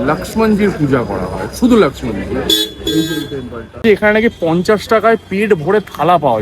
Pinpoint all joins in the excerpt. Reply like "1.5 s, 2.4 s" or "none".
3.8 s